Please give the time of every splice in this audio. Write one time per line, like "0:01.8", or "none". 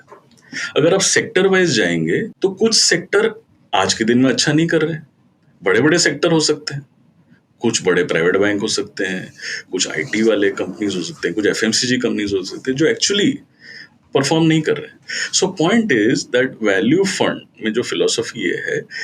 none